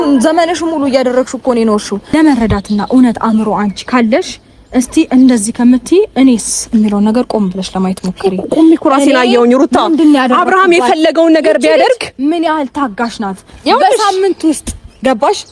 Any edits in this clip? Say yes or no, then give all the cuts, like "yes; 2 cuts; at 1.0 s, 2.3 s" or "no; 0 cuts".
yes; 1 cut; at 2.1 s